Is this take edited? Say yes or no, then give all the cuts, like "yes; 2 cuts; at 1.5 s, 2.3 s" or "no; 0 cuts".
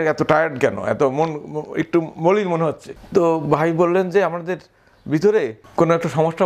yes; 2 cuts; at 2.9 s, 5.6 s